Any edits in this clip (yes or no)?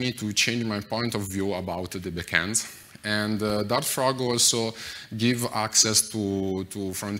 no